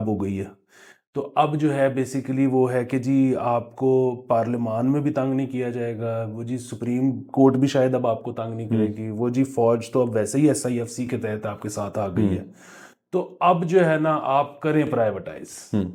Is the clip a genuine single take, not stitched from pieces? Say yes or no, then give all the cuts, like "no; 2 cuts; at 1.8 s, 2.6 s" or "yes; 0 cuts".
yes; 0 cuts